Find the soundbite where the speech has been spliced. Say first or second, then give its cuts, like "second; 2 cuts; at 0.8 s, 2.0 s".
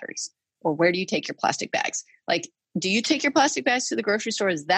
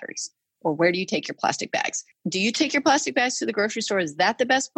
second; 1 cut; at 2.1 s